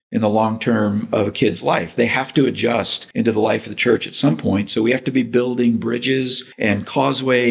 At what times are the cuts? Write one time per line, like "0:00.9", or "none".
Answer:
0:03.0
0:06.4